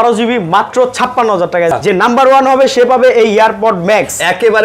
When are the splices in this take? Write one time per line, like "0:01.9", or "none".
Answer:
0:01.7